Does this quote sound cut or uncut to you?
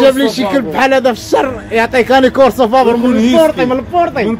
uncut